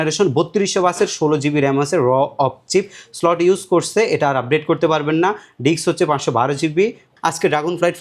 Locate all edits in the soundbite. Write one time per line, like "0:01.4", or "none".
0:07.1